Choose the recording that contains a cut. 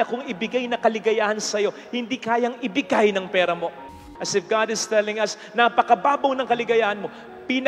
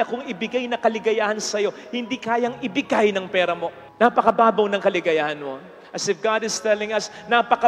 first; 1 cut; at 3.8 s

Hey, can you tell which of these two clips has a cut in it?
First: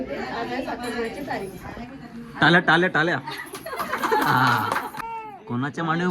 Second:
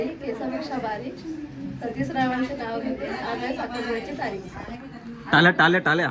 first; 1 cut; at 4.9 s

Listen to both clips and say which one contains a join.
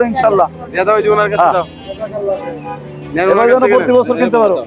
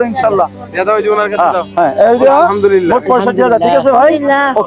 second; 1 cut; at 1.7 s

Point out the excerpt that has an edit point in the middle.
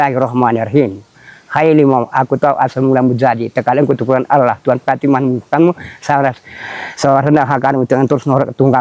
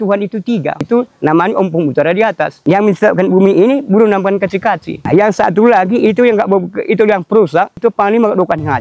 second; 4 cuts; at 0.9 s, 2.5 s, 5.0 s, 7.8 s

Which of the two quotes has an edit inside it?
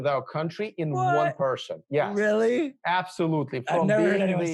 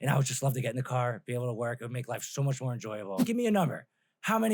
second; 1 cut; at 3.3 s

